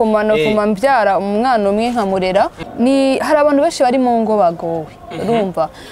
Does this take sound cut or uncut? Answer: cut